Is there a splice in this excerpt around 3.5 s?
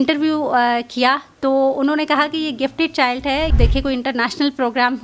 yes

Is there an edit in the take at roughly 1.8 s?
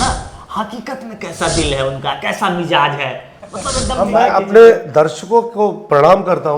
no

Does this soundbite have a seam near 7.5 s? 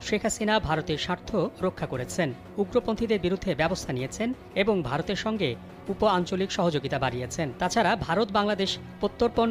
yes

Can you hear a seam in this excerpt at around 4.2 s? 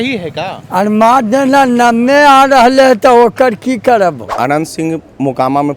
yes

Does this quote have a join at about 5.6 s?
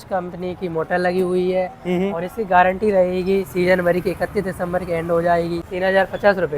yes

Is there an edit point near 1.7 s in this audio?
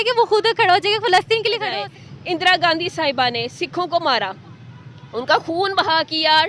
yes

